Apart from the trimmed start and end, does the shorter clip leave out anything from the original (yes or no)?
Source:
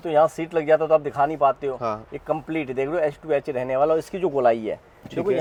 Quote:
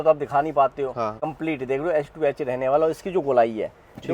yes